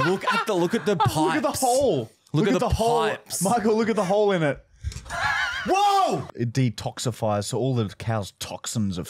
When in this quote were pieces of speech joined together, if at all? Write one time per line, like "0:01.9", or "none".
0:06.3